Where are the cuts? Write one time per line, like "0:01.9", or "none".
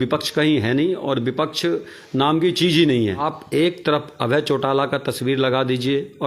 0:03.2